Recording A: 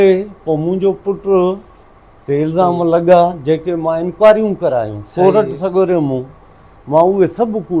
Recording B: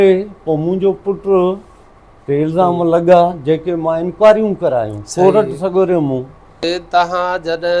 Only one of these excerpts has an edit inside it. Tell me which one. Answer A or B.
B